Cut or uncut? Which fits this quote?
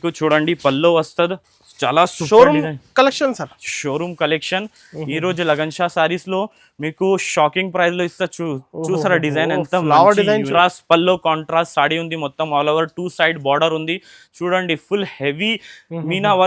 cut